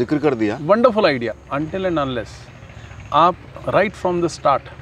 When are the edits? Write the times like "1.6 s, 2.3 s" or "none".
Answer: 1.4 s